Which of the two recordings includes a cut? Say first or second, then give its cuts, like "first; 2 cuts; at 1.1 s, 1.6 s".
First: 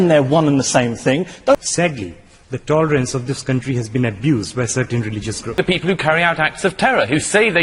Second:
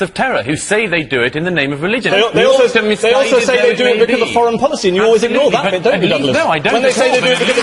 first; 2 cuts; at 1.5 s, 5.6 s